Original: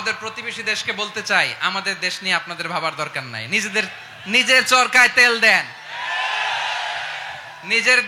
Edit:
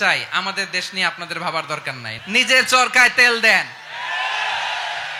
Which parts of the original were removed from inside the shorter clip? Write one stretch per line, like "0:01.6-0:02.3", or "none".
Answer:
0:03.4-0:04.1